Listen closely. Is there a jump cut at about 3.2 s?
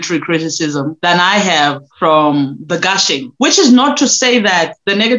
yes; 3 cuts; at 0.9 s, 1.9 s, 3.2 s

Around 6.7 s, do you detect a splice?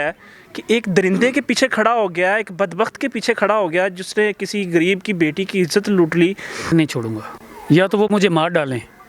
yes; 1 cut; at 6.7 s

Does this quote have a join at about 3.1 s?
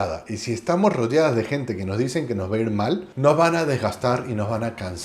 yes; 1 cut; at 3.1 s

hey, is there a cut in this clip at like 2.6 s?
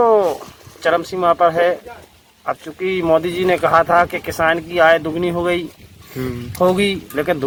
no; 0 cuts

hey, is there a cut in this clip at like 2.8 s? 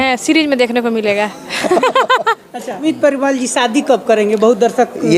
yes; 1 cut; at 2.8 s

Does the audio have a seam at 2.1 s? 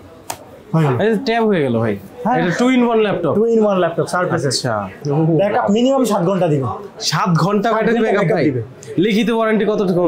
no; 1 cut; at 5.0 s

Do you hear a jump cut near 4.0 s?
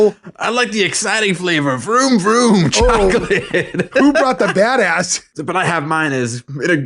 no; 1 cut; at 5.2 s

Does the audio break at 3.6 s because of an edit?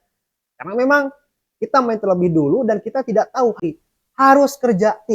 yes; 1 cut; at 3.6 s

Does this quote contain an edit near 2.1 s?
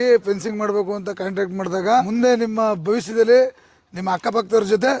yes; 1 cut; at 2.1 s

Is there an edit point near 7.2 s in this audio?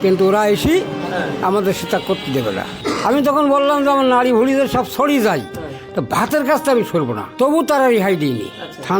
yes; 2 cuts; at 2.7 s, 7.2 s

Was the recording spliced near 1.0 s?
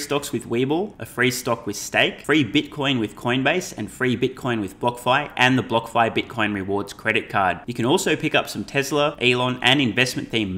yes; 3 cuts; at 1.0 s, 2.2 s, 9.2 s

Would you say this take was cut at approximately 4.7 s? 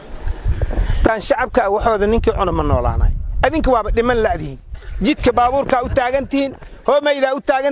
no; 1 cut; at 1.1 s

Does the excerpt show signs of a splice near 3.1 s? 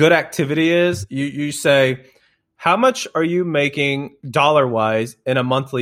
yes; 2 cuts; at 1.0 s, 3.1 s

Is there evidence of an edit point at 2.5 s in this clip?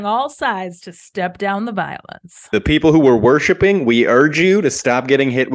yes; 1 cut; at 2.5 s

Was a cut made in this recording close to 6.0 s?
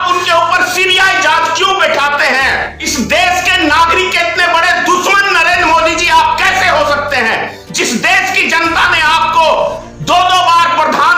no; 1 cut; at 2.8 s

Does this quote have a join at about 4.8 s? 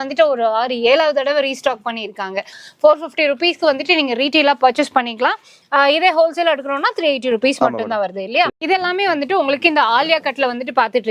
no; 2 cuts; at 2.6 s, 8.5 s

